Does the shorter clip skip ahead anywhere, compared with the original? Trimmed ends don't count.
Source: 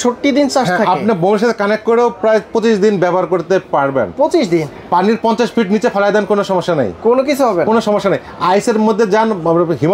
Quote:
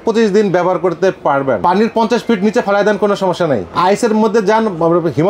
yes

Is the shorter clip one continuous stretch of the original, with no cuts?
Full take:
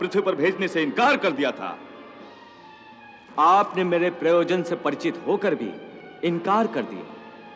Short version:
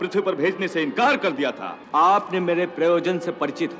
no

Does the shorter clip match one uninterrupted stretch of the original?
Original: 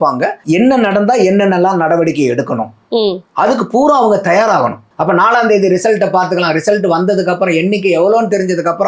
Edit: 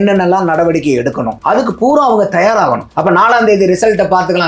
no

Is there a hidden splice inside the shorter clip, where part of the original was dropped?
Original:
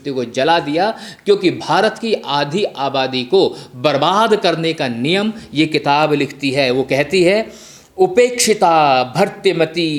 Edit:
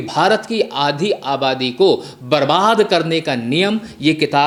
no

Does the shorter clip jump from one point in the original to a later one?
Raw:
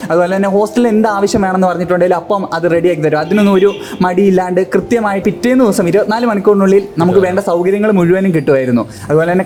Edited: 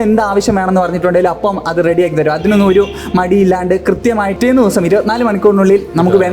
yes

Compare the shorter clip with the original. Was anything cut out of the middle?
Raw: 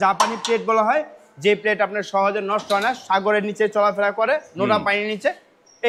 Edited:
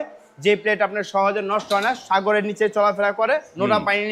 no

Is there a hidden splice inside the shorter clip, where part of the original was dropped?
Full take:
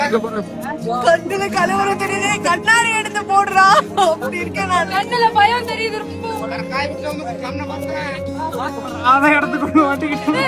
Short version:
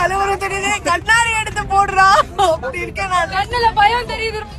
no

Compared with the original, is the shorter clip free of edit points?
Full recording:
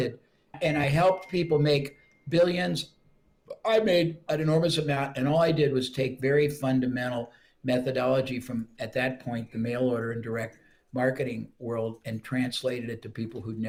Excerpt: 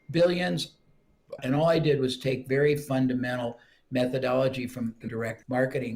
no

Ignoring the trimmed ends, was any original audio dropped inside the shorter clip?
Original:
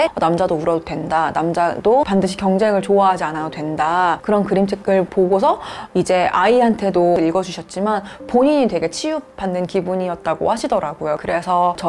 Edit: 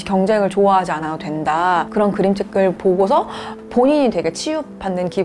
yes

